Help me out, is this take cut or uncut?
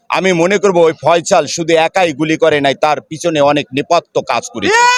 uncut